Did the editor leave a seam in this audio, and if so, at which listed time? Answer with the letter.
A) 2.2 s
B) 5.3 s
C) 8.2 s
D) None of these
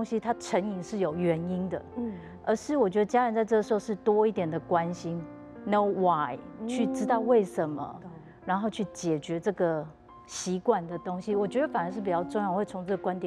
A